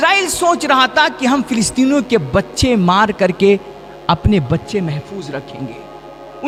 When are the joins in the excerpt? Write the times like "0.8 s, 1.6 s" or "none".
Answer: none

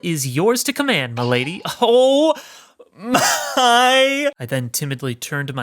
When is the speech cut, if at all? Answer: 4.4 s

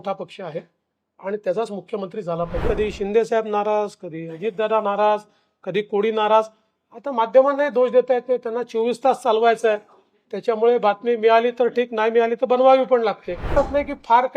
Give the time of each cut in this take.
2.6 s, 13.5 s

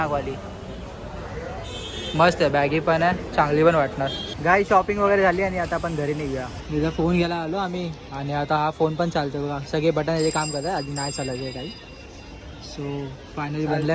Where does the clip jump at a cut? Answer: none

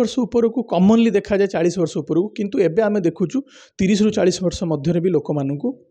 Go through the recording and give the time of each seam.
none

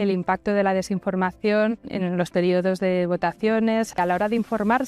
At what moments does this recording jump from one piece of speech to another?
1.9 s, 3.9 s

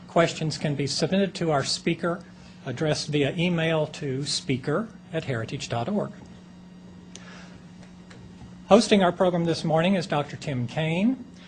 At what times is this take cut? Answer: 1.2 s

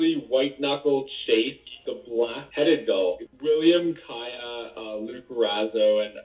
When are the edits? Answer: 1.6 s, 3.2 s

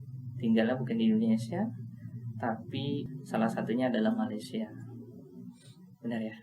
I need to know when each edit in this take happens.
3.1 s

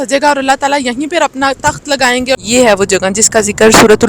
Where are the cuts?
2.4 s

